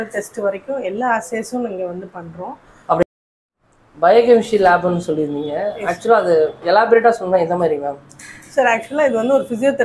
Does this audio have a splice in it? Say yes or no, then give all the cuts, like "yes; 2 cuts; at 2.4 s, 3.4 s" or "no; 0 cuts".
no; 0 cuts